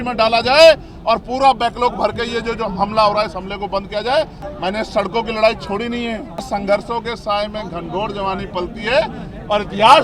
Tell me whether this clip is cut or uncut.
cut